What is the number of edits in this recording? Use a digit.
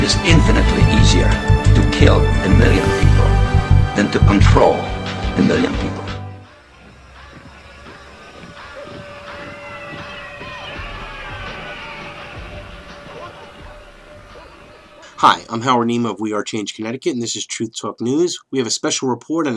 1